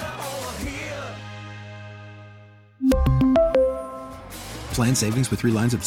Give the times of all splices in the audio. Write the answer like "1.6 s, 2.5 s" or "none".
none